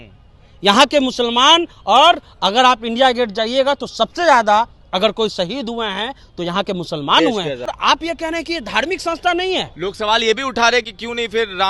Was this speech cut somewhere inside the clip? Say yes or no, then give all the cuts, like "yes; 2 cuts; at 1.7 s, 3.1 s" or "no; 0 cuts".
no; 0 cuts